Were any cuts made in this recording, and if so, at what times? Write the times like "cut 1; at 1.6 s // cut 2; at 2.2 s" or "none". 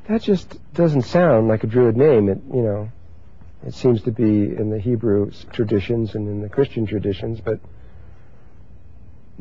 cut 1; at 6.2 s